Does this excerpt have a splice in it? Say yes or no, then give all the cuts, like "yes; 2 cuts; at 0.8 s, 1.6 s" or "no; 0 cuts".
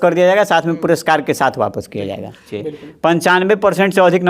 yes; 1 cut; at 2.5 s